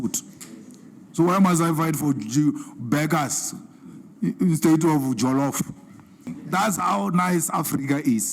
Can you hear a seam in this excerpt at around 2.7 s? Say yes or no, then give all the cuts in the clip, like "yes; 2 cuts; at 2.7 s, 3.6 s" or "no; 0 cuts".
no; 1 cut; at 6.4 s